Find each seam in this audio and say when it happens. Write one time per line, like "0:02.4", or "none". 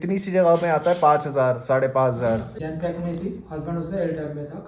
0:02.5